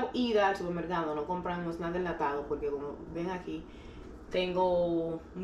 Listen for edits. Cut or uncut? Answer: uncut